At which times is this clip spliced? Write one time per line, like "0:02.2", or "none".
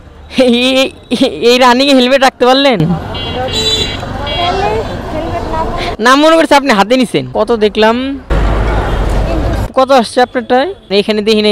none